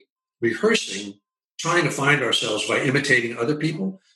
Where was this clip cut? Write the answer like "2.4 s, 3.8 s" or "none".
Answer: none